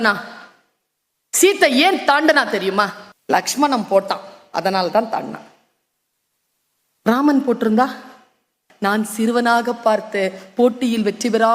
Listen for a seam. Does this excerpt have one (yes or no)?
yes